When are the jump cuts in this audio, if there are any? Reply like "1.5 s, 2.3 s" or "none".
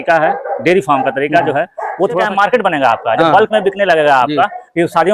2.3 s